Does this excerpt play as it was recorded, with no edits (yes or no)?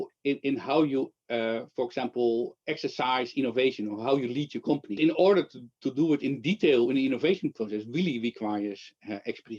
no